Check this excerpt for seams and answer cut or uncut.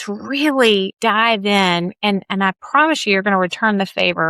cut